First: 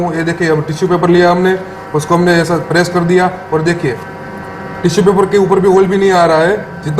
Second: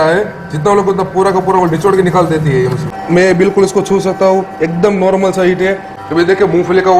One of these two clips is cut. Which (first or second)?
second